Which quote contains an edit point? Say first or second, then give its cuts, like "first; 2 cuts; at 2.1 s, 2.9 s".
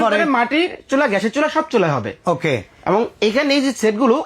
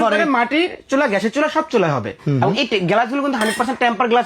second; 1 cut; at 2.1 s